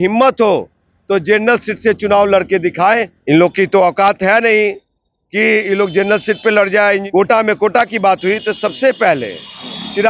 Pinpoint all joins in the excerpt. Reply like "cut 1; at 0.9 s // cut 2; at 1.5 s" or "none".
cut 1; at 3.1 s // cut 2; at 7.0 s